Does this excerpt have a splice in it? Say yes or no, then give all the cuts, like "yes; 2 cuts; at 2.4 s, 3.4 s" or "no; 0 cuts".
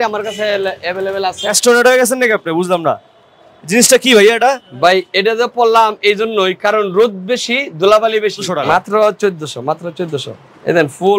yes; 2 cuts; at 1.5 s, 8.5 s